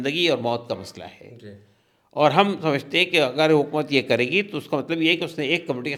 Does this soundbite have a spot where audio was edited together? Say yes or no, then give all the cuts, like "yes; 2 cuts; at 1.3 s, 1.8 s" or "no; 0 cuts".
no; 0 cuts